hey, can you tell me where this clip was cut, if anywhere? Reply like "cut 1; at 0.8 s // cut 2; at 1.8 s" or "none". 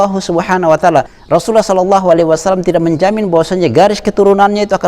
cut 1; at 1.2 s